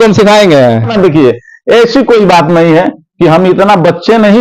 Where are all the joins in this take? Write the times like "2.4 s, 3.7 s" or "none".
0.9 s